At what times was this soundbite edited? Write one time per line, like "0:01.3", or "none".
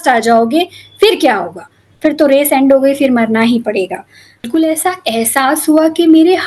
0:04.4